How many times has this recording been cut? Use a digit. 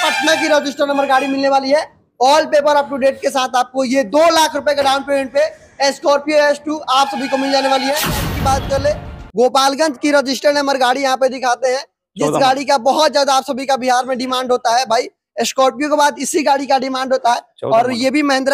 1